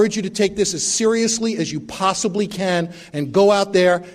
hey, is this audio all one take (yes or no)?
yes